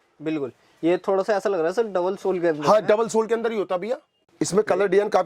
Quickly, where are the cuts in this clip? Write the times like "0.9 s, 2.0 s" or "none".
4.2 s